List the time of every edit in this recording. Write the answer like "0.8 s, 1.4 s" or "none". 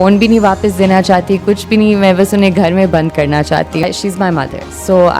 3.8 s